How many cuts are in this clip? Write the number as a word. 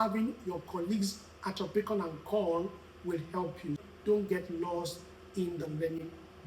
one